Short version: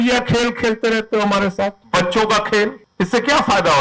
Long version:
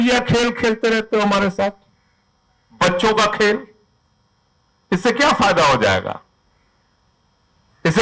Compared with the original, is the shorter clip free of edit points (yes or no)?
no